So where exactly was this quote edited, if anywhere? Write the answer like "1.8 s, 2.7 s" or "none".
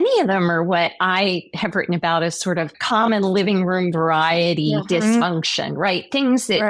2.8 s